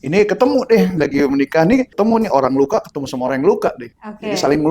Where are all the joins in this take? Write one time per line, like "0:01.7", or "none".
0:01.9